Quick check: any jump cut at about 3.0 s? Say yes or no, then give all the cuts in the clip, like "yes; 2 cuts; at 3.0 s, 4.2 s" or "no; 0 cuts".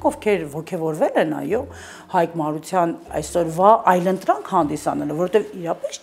yes; 1 cut; at 3.0 s